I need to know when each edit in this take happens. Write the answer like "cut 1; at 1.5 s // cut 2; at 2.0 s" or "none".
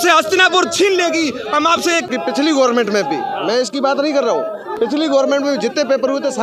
cut 1; at 2.1 s